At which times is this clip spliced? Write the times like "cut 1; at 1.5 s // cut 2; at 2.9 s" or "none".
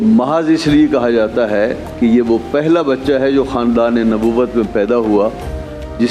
none